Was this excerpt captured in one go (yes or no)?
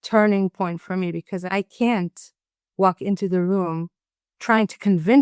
no